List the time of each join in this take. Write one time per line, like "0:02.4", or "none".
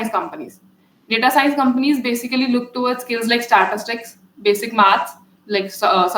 none